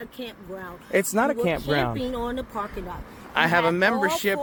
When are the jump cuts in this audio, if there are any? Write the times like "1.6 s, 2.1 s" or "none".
none